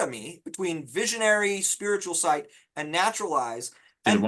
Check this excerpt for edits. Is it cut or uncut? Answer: uncut